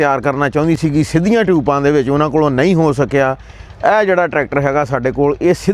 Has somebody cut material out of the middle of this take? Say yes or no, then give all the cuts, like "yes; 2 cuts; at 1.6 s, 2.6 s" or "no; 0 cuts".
no; 0 cuts